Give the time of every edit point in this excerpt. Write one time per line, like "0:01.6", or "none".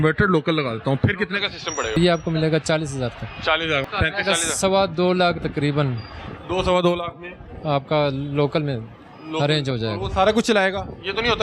0:02.0
0:03.8